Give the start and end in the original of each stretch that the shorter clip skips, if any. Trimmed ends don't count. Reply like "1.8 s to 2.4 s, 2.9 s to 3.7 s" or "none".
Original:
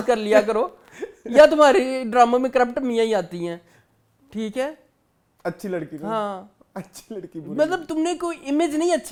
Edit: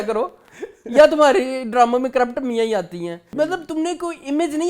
3.6 s to 7.4 s

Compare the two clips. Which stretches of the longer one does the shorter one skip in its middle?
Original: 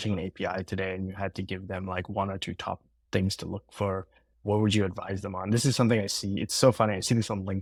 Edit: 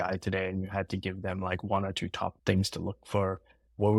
2.8 s to 3.0 s

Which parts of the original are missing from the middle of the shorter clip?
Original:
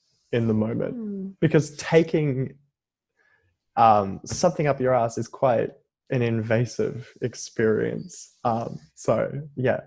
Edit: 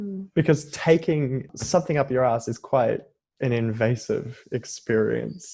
2.6 s to 4.2 s

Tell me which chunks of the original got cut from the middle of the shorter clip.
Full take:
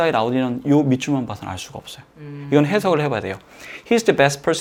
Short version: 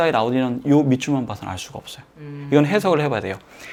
none

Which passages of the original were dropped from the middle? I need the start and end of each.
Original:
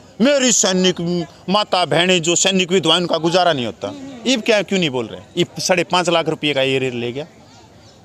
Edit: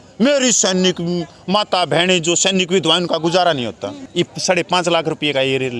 4.0 s to 5.2 s

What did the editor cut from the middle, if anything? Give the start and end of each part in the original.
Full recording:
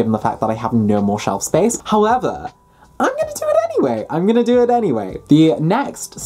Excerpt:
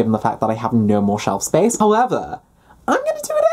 1.7 s to 1.9 s

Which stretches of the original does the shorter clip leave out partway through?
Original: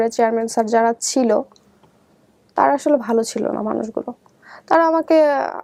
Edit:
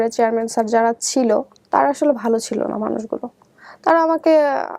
1.6 s to 2.4 s

